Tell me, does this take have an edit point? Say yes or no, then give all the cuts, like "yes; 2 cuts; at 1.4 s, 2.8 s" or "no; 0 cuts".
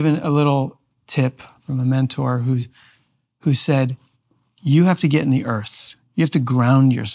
yes; 1 cut; at 1.6 s